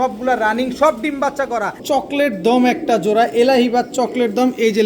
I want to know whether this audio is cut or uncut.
cut